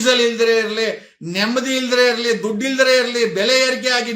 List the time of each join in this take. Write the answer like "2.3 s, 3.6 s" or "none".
none